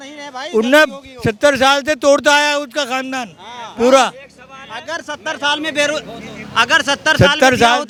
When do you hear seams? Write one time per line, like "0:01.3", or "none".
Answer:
none